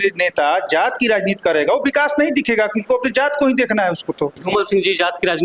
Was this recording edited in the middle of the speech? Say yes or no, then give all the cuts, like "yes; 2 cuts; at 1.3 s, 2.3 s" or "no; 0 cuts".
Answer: yes; 1 cut; at 4.3 s